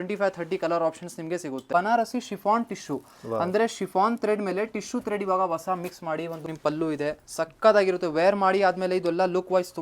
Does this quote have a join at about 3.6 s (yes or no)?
no